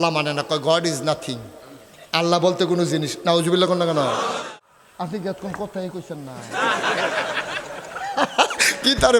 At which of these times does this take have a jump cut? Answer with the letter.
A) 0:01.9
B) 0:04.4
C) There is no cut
B